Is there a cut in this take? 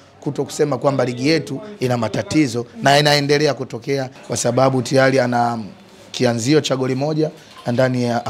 yes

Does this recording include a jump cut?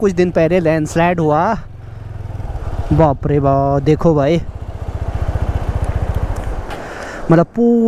no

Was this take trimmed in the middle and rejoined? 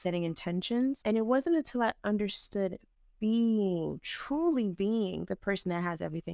yes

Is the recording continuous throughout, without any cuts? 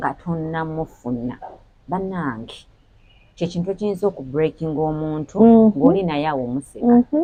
yes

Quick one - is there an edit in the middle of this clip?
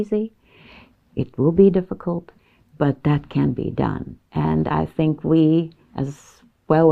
no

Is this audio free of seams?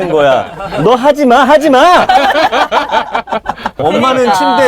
no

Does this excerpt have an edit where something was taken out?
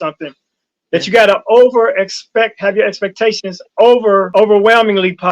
yes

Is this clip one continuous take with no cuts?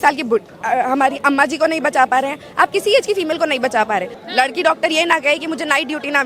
no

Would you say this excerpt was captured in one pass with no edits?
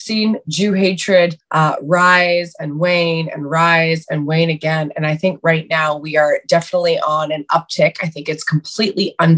no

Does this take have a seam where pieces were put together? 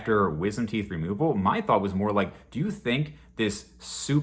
no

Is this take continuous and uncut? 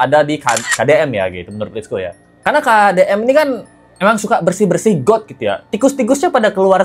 yes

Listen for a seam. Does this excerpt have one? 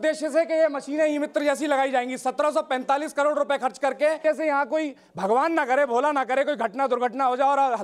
yes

